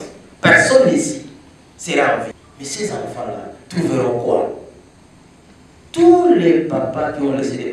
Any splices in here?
yes; 1 cut; at 2.5 s

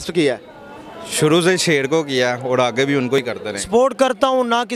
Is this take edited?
yes; 1 cut; at 3.3 s

